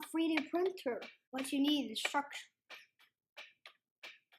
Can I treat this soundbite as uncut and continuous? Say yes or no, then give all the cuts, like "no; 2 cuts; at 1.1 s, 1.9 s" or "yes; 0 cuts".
no; 1 cut; at 1.2 s